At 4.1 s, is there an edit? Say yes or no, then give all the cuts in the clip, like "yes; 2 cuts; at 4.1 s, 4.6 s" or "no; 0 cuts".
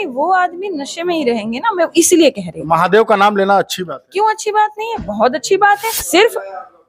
no; 1 cut; at 5.9 s